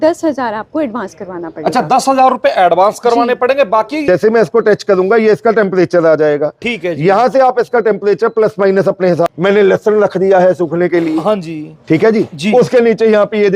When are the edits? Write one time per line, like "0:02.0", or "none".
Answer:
0:04.0
0:09.3